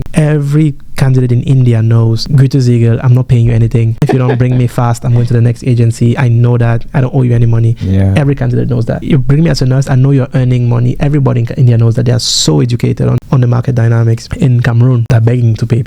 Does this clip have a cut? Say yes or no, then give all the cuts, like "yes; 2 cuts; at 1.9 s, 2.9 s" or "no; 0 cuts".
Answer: no; 0 cuts